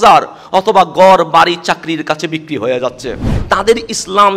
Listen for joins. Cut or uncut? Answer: cut